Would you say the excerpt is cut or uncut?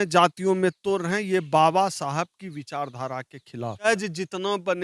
cut